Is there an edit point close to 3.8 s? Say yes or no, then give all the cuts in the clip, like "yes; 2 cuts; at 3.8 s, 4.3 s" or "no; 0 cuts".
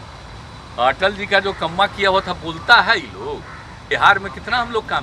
yes; 1 cut; at 3.8 s